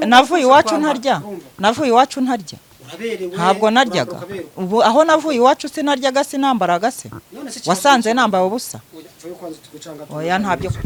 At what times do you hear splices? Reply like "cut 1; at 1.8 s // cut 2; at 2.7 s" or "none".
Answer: none

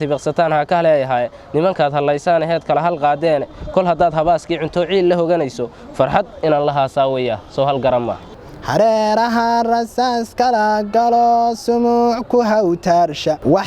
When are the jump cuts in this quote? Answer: cut 1; at 8.5 s

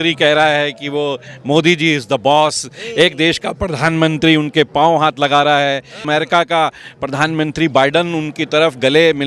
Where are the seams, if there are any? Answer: cut 1; at 6.0 s

